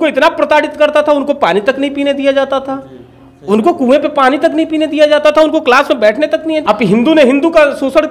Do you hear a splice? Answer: yes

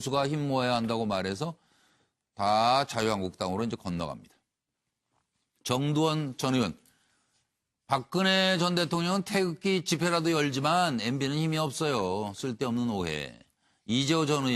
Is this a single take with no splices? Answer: no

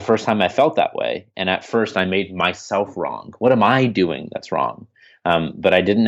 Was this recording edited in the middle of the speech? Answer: no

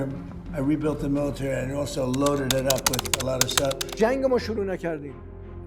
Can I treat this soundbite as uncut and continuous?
no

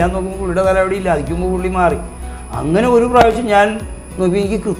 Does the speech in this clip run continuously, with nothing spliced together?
yes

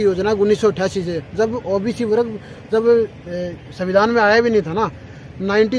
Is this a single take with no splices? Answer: yes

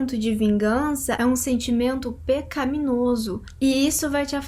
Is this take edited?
yes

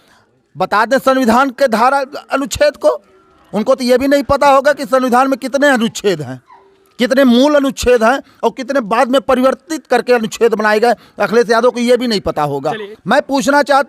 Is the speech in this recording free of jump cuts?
no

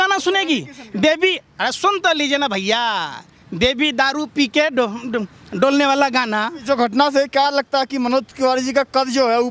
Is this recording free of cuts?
no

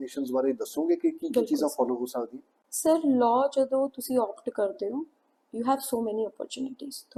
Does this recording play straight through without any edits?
yes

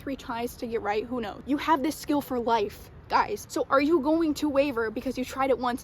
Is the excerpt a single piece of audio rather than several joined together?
yes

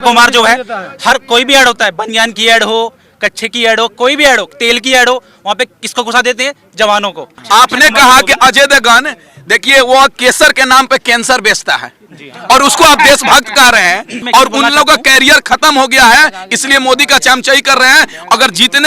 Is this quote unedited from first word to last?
no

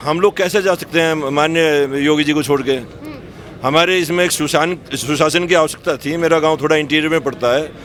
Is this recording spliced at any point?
no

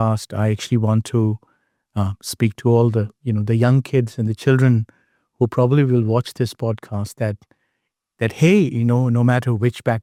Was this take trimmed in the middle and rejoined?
no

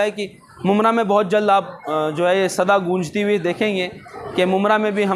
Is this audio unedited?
yes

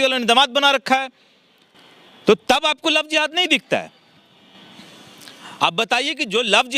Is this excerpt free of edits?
yes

